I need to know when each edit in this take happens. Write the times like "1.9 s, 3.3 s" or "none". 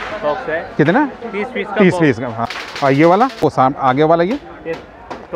2.4 s, 3.4 s